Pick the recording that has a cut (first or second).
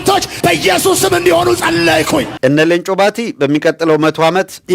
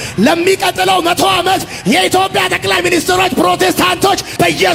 first